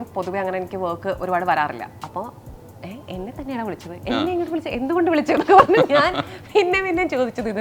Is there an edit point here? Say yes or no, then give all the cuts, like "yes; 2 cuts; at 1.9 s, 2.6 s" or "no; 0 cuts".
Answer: no; 0 cuts